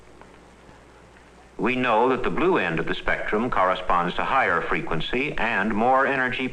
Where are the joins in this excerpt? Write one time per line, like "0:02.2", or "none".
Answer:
none